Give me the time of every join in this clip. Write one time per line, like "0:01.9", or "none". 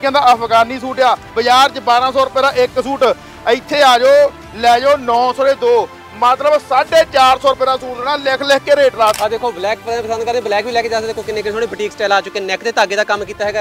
0:01.3
0:09.2